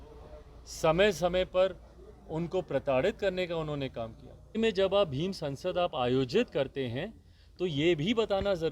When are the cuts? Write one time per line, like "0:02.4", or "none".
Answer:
0:04.6